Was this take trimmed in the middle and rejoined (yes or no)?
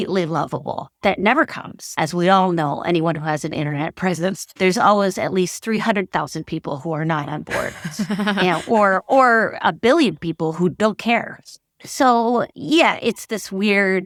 no